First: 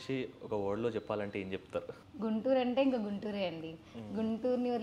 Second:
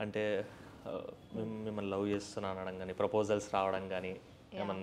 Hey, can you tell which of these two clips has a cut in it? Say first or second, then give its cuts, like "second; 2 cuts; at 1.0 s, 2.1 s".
first; 1 cut; at 2.0 s